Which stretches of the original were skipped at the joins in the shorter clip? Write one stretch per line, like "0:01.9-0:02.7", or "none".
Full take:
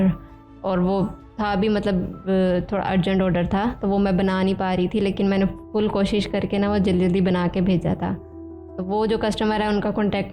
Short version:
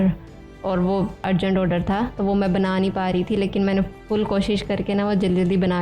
0:01.2-0:02.9